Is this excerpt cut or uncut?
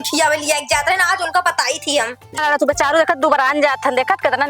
cut